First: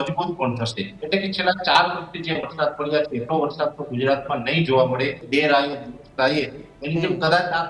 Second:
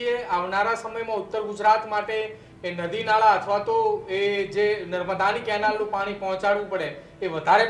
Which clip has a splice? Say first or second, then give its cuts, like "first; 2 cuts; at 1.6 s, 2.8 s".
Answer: first; 2 cuts; at 0.9 s, 5.2 s